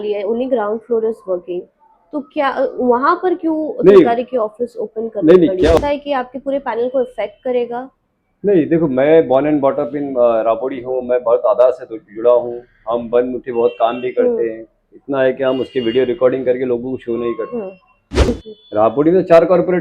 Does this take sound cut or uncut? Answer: cut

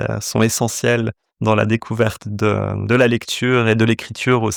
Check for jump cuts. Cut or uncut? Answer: uncut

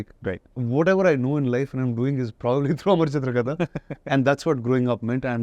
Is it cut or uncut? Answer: uncut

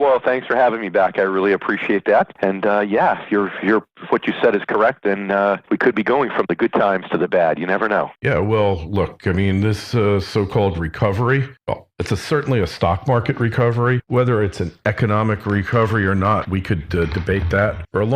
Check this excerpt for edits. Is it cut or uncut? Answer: cut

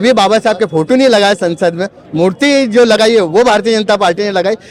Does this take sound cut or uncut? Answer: uncut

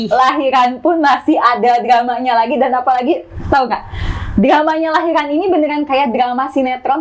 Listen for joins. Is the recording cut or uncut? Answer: uncut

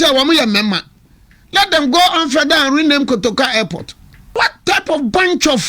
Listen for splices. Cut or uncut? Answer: cut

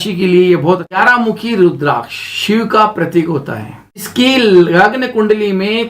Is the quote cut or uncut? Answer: cut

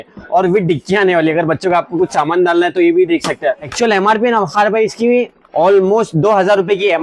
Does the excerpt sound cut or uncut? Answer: cut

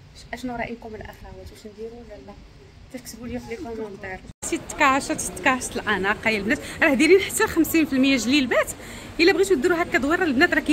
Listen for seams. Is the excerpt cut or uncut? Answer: cut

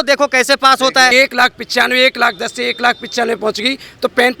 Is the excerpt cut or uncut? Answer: cut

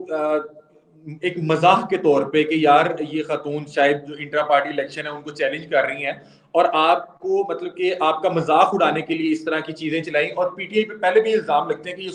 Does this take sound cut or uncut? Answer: uncut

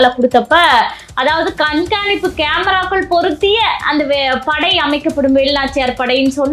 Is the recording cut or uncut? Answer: uncut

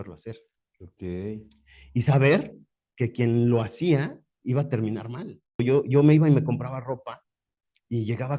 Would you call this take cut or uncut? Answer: cut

